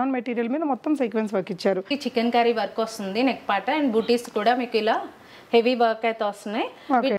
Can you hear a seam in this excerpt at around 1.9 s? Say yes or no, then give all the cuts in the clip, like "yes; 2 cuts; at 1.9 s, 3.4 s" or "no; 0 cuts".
yes; 1 cut; at 1.9 s